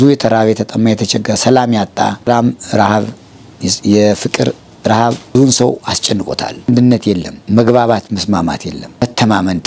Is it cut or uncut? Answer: cut